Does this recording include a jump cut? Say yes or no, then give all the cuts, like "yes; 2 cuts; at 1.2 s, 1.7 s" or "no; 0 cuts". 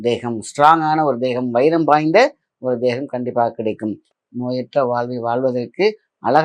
yes; 1 cut; at 4.1 s